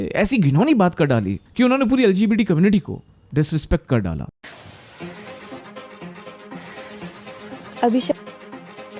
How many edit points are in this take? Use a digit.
0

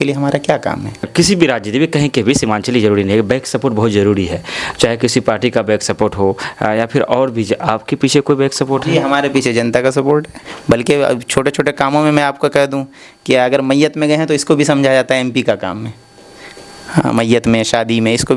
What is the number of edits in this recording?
2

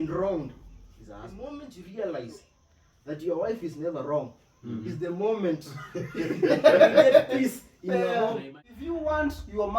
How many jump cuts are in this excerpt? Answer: 2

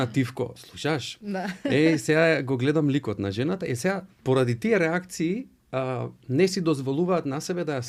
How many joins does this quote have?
0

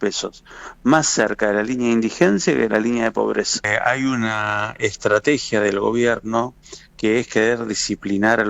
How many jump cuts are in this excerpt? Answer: 1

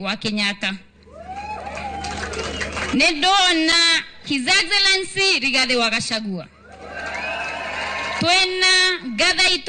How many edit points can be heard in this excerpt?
0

